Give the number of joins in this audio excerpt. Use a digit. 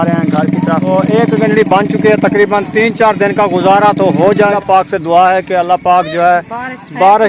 2